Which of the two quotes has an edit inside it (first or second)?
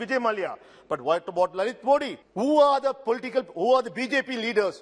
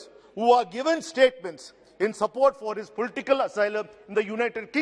first